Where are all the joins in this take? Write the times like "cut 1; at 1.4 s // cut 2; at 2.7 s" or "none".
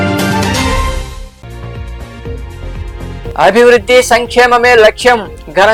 none